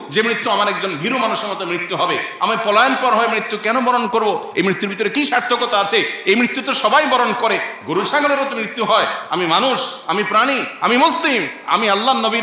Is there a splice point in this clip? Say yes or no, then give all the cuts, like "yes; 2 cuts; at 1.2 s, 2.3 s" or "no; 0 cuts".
no; 0 cuts